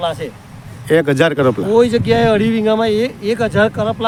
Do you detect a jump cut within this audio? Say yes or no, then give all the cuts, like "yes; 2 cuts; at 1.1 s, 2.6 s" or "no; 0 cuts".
no; 0 cuts